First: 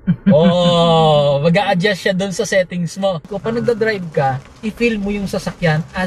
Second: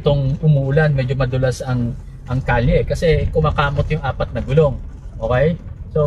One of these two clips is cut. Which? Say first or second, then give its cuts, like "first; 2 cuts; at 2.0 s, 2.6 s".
first; 1 cut; at 3.3 s